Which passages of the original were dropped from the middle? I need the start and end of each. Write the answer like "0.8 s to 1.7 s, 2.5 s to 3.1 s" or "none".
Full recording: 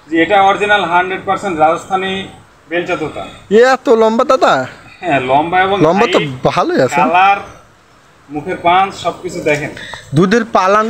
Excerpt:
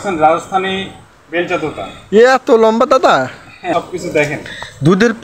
5.0 s to 9.0 s